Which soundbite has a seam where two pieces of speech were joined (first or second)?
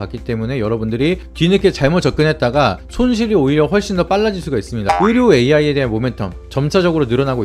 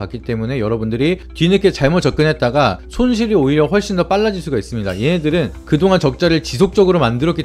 first